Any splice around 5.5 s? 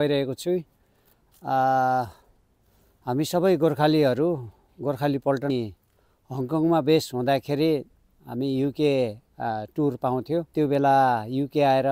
yes; 2 cuts; at 5.5 s, 10.5 s

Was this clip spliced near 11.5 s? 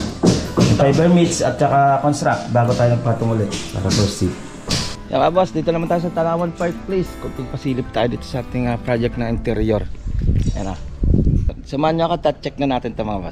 yes; 2 cuts; at 4.9 s, 11.5 s

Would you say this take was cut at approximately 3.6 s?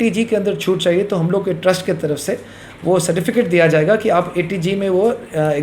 no; 0 cuts

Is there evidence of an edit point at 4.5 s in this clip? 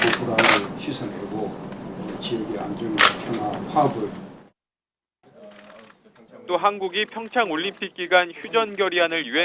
yes; 1 cut; at 4.5 s

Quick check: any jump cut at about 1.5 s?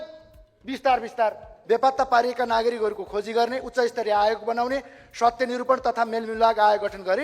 yes; 1 cut; at 1.5 s

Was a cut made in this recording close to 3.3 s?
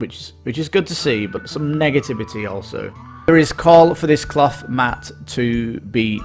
yes; 1 cut; at 3.3 s

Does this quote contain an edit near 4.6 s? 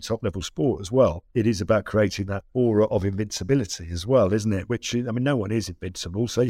yes; 3 cuts; at 1.2 s, 2.4 s, 4.6 s

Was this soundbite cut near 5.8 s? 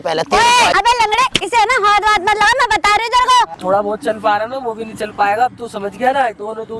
no; 2 cuts; at 0.7 s, 3.6 s

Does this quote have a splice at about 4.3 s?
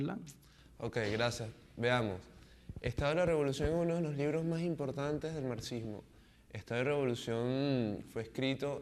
yes; 1 cut; at 4.3 s

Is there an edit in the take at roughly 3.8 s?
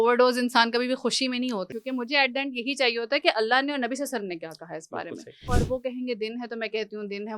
no; 2 cuts; at 1.7 s, 5.5 s

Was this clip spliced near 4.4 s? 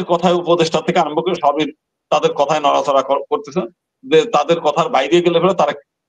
no; 0 cuts

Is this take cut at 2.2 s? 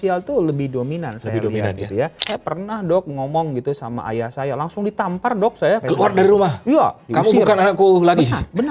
yes; 2 cuts; at 2.2 s, 5.8 s

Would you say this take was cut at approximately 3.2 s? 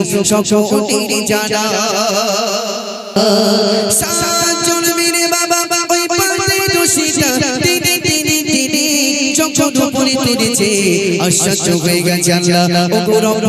yes; 1 cut; at 3.2 s

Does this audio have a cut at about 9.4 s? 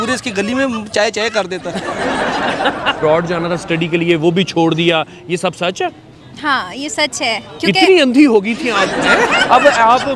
yes; 2 cuts; at 3.0 s, 9.4 s

